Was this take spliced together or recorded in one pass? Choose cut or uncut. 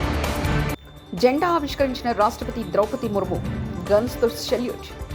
uncut